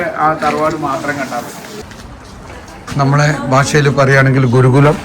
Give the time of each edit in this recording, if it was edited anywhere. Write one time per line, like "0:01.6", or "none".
0:01.7